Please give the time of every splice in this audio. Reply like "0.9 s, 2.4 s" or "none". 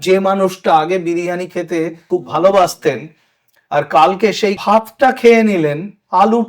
2.0 s, 4.6 s